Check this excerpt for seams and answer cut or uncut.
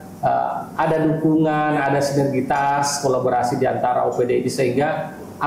uncut